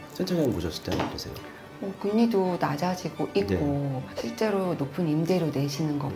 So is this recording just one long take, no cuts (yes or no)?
yes